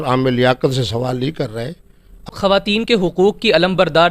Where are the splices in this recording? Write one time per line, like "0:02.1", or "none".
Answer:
0:02.3